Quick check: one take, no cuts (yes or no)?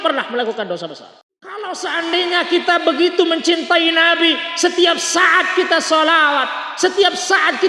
no